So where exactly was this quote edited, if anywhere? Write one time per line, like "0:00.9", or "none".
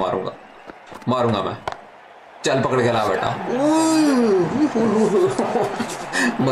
none